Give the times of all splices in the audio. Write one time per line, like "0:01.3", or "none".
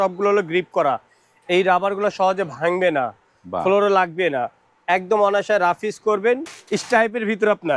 0:06.5